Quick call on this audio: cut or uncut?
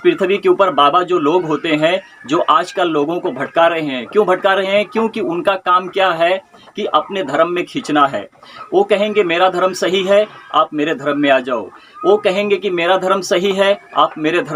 uncut